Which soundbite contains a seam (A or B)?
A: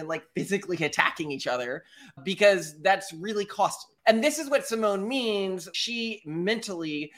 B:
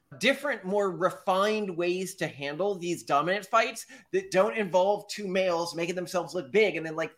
A